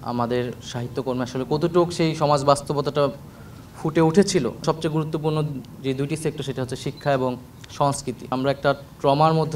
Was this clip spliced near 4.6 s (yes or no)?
yes